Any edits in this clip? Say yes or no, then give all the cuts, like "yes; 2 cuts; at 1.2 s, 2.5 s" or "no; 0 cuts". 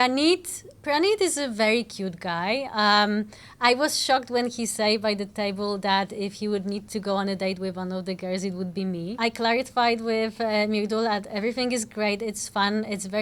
yes; 1 cut; at 9.1 s